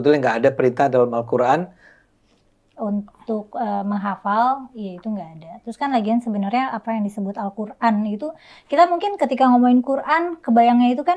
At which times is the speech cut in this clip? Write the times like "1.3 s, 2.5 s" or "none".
none